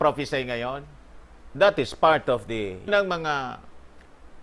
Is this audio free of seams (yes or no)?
no